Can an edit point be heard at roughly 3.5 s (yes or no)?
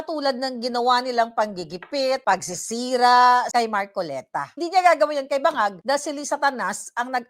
yes